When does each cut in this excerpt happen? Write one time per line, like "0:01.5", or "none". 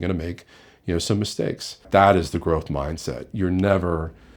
0:01.9